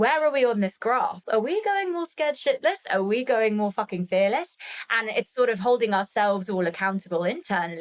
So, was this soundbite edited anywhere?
yes; 1 cut; at 1.2 s

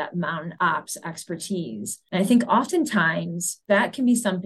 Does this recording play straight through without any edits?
no; 1 cut; at 1.9 s

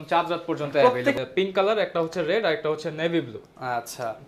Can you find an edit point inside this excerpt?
yes; 1 cut; at 1.2 s

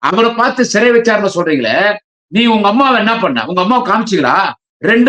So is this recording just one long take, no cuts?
yes; 0 cuts

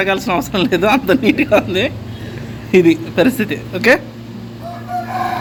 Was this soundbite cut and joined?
no; 0 cuts

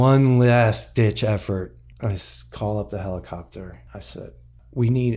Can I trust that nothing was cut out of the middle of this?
no; 2 cuts; at 1.8 s, 4.2 s

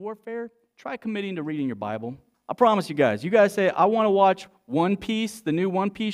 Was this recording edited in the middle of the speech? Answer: yes; 1 cut; at 2.3 s

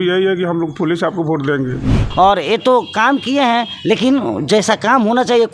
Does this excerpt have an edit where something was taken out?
yes; 1 cut; at 2.0 s

